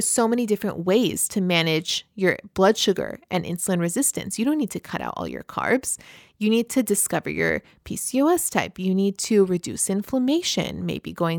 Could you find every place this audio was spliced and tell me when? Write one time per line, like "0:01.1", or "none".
none